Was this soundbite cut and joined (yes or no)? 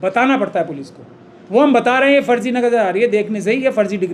no